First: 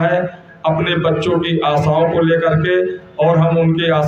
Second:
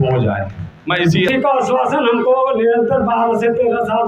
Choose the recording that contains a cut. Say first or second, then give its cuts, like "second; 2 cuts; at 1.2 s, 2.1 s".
second; 1 cut; at 1.3 s